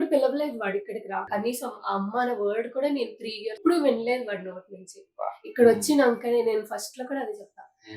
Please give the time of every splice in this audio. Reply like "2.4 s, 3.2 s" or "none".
1.3 s, 3.6 s